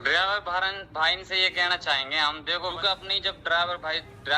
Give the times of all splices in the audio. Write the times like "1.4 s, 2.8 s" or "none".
2.7 s